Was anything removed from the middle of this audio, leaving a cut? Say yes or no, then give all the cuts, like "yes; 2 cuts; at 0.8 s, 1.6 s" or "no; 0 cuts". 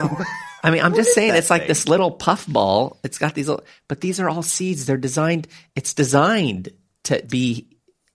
yes; 1 cut; at 7.3 s